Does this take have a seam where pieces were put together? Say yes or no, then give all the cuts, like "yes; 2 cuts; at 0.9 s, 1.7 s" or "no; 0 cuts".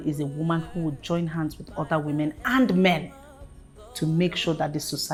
no; 0 cuts